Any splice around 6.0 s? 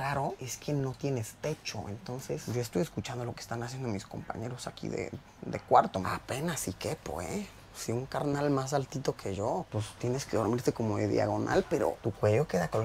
yes; 2 cuts; at 2.5 s, 6.0 s

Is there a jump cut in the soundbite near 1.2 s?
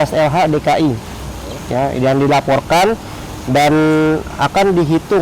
no; 0 cuts

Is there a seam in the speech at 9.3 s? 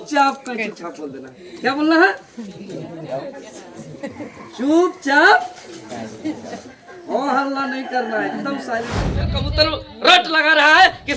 yes; 1 cut; at 9.3 s

